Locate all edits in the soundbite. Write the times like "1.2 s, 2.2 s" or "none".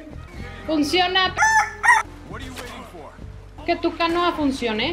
3.6 s